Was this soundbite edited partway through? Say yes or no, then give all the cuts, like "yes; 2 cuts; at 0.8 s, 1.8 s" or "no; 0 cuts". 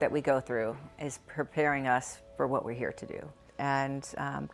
yes; 1 cut; at 3.4 s